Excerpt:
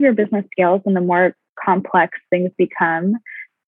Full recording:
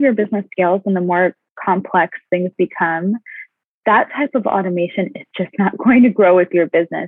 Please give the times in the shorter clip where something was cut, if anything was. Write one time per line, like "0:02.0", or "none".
none